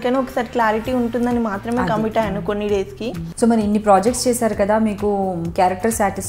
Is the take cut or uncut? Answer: cut